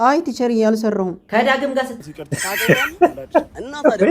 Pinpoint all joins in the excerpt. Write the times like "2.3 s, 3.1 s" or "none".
2.0 s